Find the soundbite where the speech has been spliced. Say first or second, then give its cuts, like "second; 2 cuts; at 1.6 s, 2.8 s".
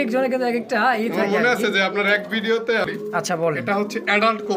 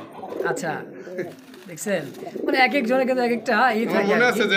first; 1 cut; at 2.9 s